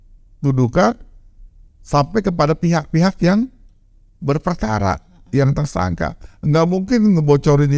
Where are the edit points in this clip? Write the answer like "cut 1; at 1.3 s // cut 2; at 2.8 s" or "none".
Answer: none